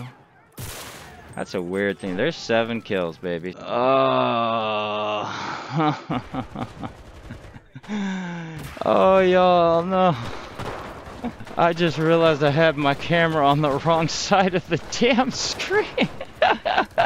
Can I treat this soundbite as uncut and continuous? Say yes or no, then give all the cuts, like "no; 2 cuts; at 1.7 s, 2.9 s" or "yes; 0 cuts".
no; 2 cuts; at 3.5 s, 11.4 s